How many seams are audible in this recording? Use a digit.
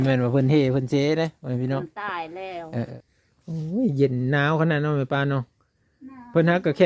1